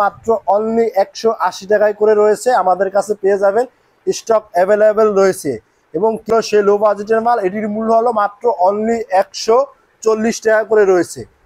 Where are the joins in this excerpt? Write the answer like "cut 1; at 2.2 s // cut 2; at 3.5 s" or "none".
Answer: cut 1; at 6.3 s

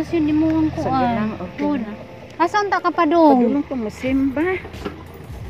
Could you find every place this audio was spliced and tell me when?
none

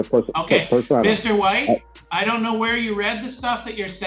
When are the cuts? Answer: cut 1; at 2.0 s

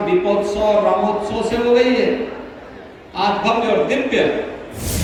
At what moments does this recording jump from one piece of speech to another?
none

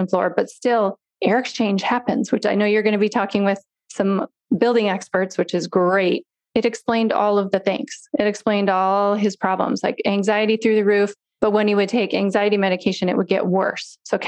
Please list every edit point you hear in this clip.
cut 1; at 6.5 s

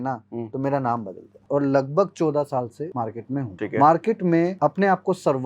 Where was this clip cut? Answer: cut 1; at 1.4 s // cut 2; at 3.2 s // cut 3; at 4.5 s

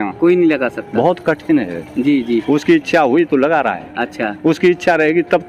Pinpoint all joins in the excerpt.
none

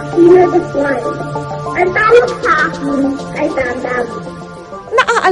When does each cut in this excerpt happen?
none

